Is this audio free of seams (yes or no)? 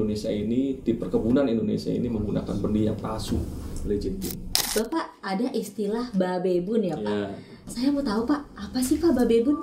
no